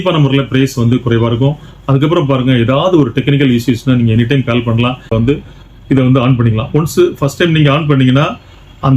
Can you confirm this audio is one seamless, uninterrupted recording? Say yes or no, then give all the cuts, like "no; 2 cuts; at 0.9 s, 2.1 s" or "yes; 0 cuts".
no; 1 cut; at 5.1 s